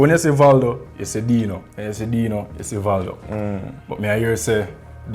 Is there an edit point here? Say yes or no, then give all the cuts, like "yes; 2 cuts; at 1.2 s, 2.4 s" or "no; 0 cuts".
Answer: no; 0 cuts